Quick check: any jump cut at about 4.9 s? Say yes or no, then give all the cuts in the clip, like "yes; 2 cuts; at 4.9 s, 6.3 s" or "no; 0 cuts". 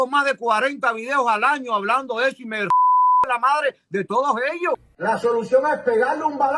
yes; 1 cut; at 4.9 s